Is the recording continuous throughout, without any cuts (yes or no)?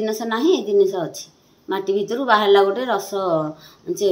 yes